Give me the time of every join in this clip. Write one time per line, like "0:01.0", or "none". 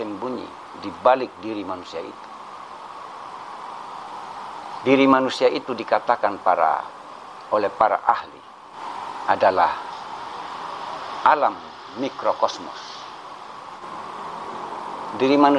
0:04.1
0:13.8